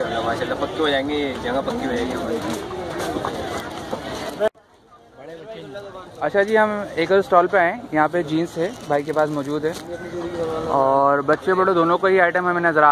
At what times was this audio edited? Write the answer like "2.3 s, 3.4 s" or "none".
none